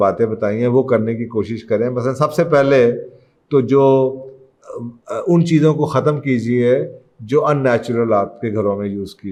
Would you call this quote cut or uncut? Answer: uncut